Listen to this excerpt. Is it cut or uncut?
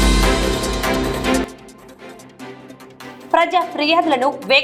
cut